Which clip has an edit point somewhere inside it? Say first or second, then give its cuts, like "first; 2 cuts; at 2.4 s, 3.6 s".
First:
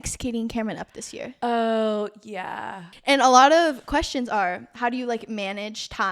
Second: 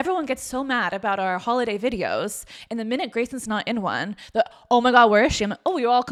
first; 1 cut; at 2.9 s